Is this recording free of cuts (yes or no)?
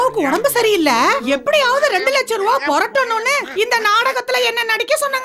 yes